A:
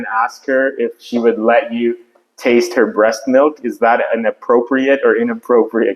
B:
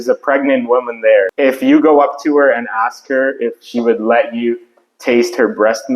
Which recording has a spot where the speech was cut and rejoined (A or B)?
B